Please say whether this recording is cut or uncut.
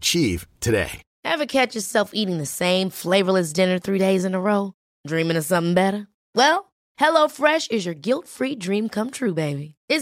cut